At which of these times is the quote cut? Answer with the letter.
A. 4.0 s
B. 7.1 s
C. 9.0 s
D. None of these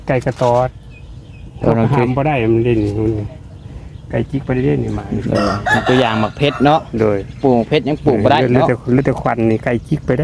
D